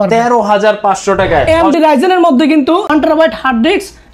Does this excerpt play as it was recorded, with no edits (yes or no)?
no